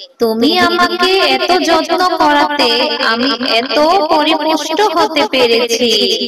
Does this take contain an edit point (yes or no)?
no